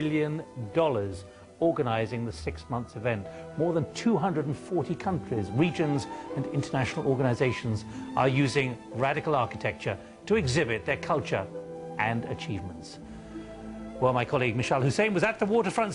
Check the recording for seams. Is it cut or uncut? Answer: uncut